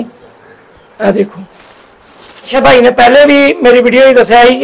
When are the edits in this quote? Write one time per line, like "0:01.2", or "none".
0:02.5